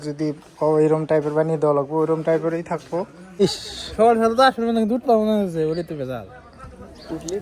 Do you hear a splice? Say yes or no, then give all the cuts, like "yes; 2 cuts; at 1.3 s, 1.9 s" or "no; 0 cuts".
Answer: yes; 1 cut; at 3.4 s